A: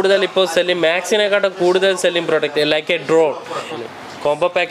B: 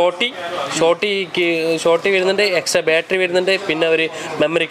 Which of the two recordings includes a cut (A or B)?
A